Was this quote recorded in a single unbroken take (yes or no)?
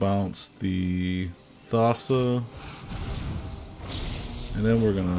yes